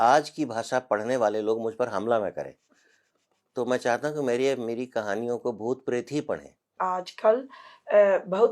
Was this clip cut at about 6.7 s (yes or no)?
yes